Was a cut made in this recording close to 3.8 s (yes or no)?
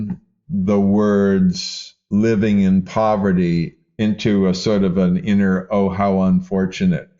yes